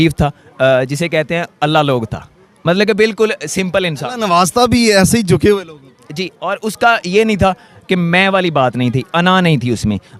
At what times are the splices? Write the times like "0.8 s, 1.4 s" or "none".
none